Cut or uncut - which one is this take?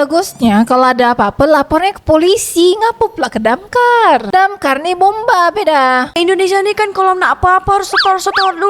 cut